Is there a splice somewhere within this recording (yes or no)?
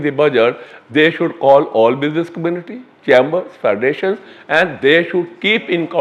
no